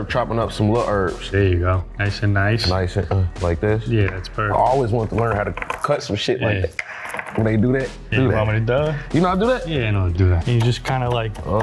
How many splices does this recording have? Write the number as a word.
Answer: zero